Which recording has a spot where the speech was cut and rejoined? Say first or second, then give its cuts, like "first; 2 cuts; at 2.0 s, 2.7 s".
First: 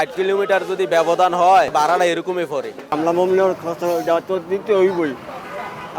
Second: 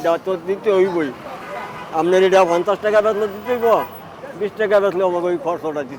first; 1 cut; at 2.9 s